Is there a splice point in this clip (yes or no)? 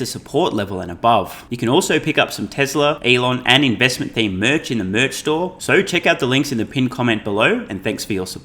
yes